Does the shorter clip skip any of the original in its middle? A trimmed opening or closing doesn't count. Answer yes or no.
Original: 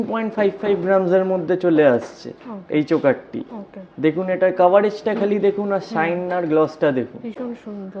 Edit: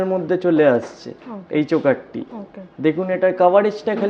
no